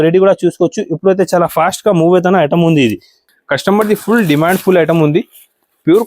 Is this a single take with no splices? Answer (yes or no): no